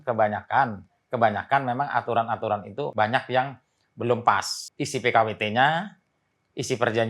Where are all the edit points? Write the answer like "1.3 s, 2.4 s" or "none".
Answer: 2.9 s, 4.6 s